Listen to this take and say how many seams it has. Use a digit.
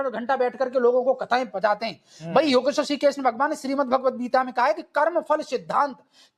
0